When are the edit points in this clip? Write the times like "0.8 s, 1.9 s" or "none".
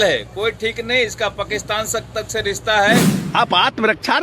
3.2 s